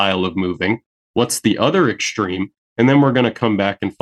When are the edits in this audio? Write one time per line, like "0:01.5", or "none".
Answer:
none

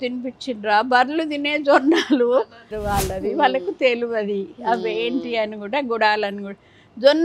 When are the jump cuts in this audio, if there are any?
0:02.7

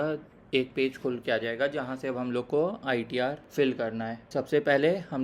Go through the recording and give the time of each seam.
0:03.4
0:04.2

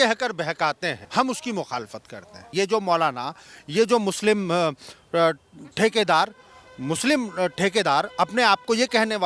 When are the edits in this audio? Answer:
0:01.0
0:02.4

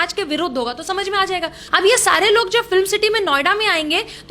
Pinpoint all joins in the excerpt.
0:01.6

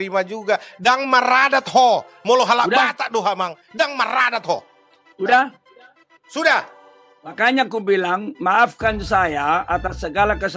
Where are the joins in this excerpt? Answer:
0:07.3

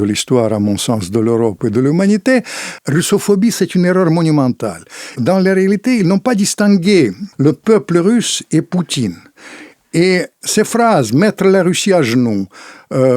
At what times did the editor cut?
0:02.8
0:05.1
0:07.2
0:10.4

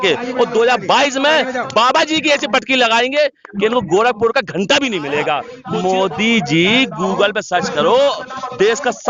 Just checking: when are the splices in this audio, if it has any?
0:05.5

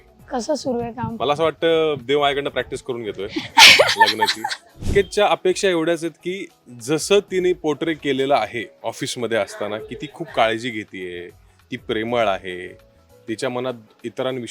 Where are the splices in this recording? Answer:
0:04.9
0:08.7

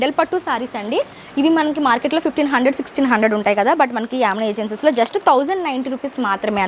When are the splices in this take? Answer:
none

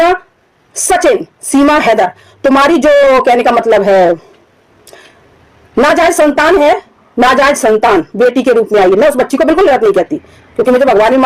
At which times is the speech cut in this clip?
none

